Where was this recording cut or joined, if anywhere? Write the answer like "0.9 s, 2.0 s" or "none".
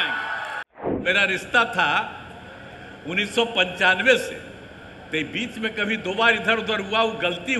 1.0 s

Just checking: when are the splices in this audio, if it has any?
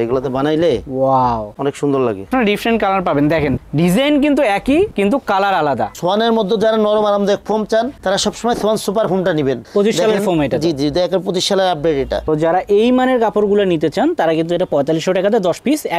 2.3 s, 5.9 s, 9.6 s, 12.3 s

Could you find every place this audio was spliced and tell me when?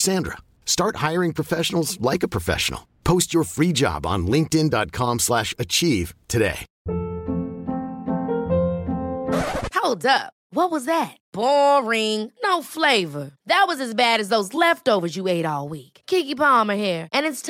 6.7 s

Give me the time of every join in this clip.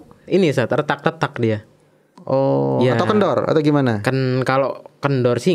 none

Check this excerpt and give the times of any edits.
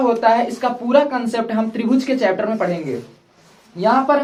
none

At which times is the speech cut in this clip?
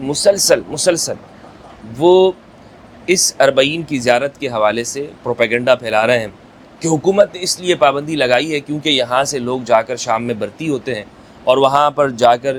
none

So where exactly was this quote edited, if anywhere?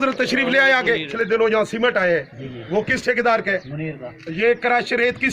1.1 s

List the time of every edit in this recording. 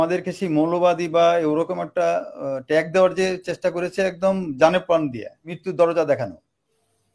5.6 s

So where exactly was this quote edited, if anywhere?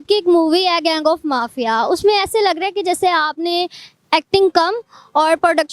none

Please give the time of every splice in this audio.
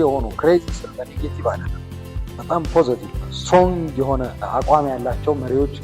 3.1 s, 4.4 s

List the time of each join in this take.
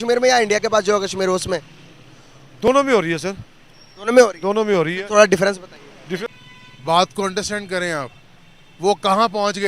6.3 s

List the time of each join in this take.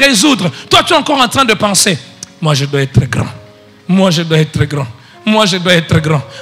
none

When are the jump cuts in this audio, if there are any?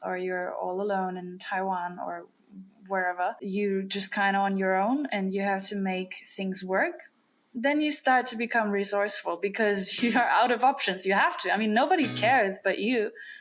3.4 s

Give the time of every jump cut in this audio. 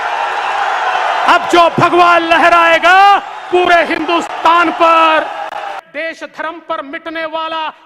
5.8 s

